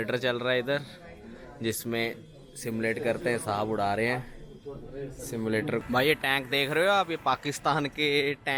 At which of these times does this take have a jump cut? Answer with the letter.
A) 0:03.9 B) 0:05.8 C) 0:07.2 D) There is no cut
B